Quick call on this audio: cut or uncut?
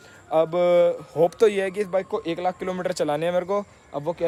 uncut